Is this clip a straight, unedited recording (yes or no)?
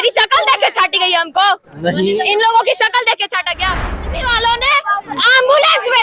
no